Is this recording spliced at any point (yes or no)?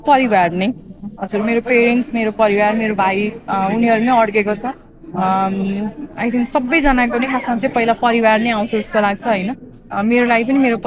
no